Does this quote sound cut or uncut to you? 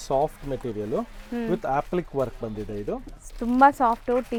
uncut